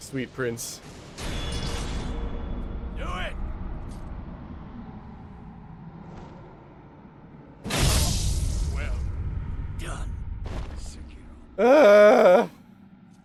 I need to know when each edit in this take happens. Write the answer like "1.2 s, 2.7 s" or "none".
none